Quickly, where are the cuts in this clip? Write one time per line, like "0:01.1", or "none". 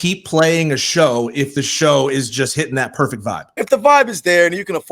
0:03.6

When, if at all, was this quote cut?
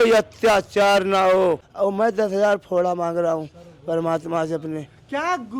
0:01.7

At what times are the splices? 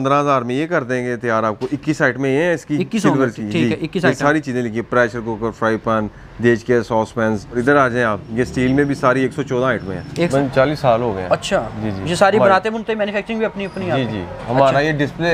0:07.6
0:10.3

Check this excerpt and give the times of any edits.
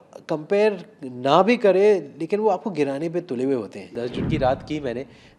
0:04.0

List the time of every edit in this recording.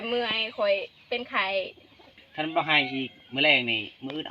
0:02.2

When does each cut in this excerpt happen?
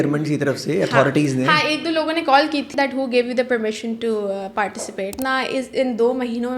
0:02.7
0:05.2

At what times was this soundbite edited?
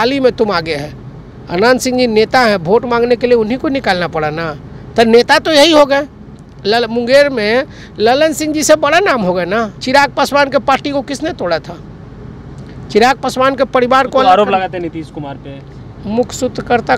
0:09.7

